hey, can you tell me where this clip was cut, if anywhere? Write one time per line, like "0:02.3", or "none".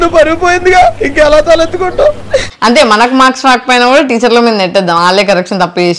0:02.5